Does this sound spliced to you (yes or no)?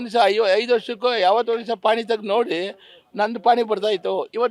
no